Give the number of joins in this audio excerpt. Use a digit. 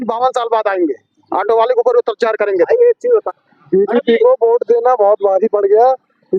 1